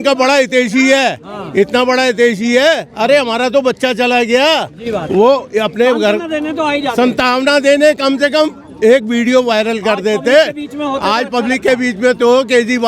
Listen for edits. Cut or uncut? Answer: uncut